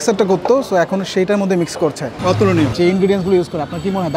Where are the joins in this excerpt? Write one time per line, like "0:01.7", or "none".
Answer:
0:02.3

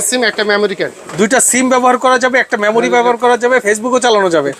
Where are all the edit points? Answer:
0:03.6

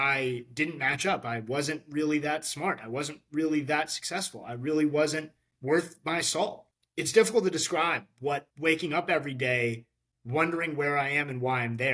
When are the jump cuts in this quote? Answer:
0:06.7
0:08.5

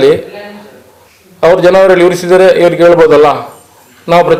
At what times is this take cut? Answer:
none

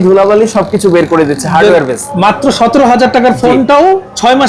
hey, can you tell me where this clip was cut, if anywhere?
0:02.0

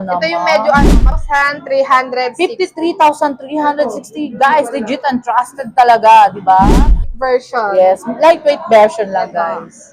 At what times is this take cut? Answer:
0:01.2
0:06.7

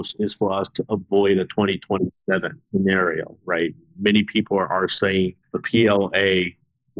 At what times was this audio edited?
0:02.6
0:05.6

